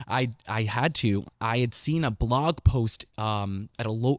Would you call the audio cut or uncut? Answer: cut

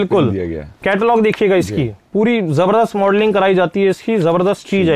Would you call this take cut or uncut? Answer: uncut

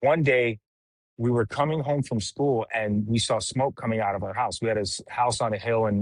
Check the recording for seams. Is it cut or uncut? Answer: uncut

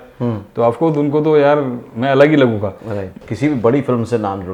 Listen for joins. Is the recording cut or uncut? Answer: uncut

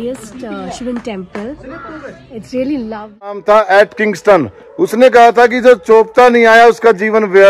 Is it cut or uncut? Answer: cut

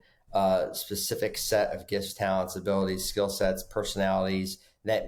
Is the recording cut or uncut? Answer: uncut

